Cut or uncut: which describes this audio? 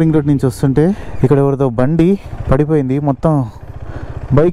cut